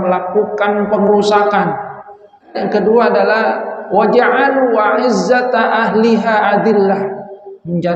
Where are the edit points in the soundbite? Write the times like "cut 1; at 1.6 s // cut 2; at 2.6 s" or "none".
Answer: cut 1; at 2.6 s